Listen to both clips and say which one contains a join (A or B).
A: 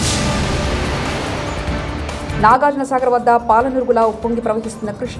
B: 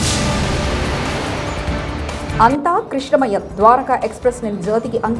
B